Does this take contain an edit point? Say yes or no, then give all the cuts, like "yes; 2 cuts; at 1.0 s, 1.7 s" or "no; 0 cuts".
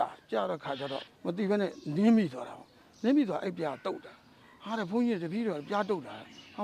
yes; 1 cut; at 1.1 s